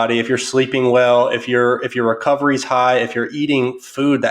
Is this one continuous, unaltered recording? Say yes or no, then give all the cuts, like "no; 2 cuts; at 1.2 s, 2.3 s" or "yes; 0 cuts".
yes; 0 cuts